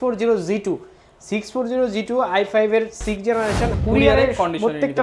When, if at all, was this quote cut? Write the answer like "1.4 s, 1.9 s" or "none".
3.7 s